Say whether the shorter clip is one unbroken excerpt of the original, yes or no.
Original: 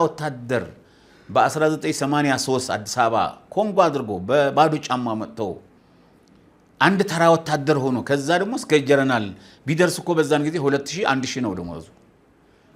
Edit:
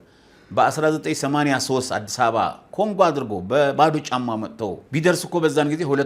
no